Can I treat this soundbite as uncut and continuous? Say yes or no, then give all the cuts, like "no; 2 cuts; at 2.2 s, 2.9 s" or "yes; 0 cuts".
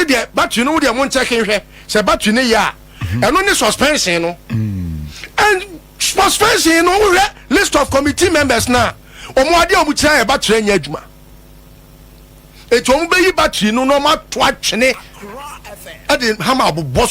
no; 1 cut; at 1.5 s